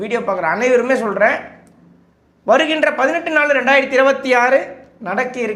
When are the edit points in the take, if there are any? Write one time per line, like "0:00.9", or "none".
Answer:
none